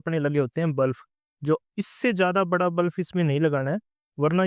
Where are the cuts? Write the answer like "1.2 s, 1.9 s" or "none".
1.6 s